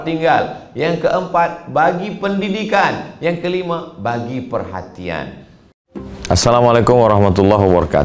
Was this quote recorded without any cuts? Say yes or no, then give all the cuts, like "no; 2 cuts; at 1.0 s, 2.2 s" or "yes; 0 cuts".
no; 1 cut; at 5.8 s